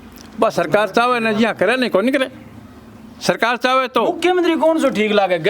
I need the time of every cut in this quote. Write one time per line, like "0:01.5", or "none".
none